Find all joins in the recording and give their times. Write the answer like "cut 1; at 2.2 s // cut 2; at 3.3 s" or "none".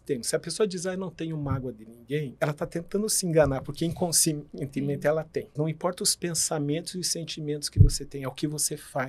cut 1; at 2.3 s // cut 2; at 5.5 s

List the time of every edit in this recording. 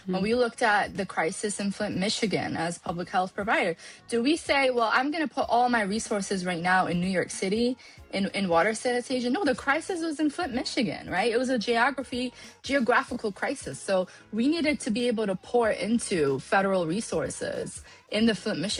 none

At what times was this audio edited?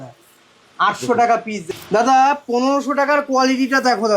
cut 1; at 1.7 s

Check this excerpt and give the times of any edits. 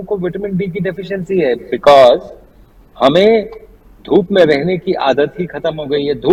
none

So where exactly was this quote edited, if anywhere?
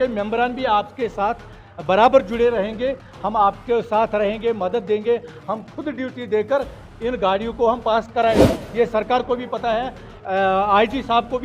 cut 1; at 8.6 s

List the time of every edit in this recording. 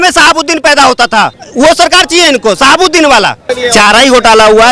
cut 1; at 1.3 s // cut 2; at 3.5 s

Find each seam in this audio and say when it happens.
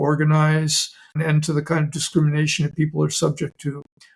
cut 1; at 1.2 s

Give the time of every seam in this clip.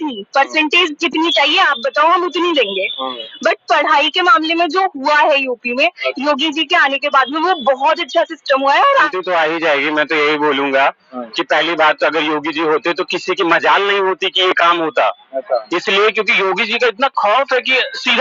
cut 1; at 9.1 s

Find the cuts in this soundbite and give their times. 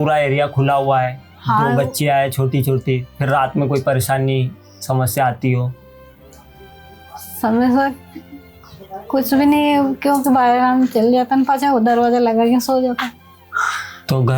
none

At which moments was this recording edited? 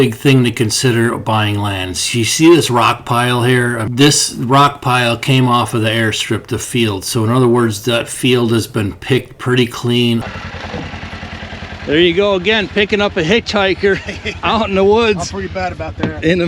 cut 1; at 3.9 s // cut 2; at 10.2 s

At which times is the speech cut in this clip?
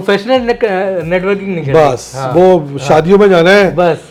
none

